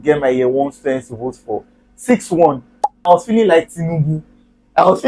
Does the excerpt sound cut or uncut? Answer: cut